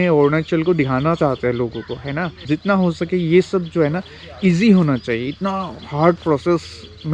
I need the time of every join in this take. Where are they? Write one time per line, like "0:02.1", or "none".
0:02.4

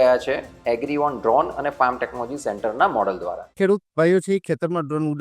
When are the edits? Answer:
0:03.4

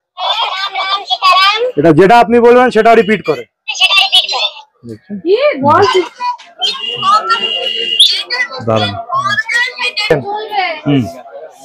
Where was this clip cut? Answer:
none

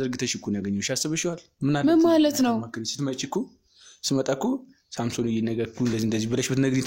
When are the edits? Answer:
none

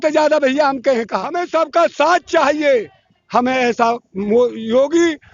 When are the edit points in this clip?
0:01.4

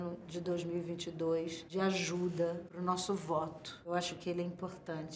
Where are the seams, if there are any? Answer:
0:01.6
0:02.7
0:03.7

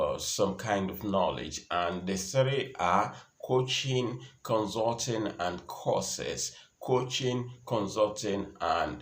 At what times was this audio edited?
none

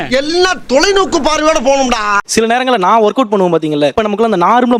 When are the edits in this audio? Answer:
0:02.2

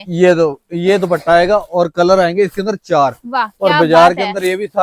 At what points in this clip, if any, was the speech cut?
none

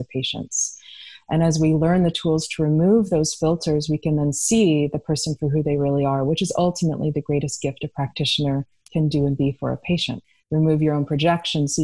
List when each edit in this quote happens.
0:08.8
0:10.2

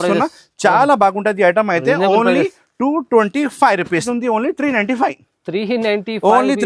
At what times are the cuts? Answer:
0:04.0

